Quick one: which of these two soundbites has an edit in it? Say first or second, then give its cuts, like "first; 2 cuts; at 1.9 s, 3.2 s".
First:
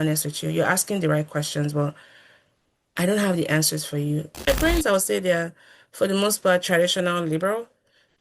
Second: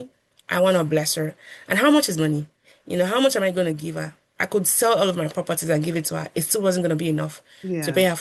first; 1 cut; at 4.5 s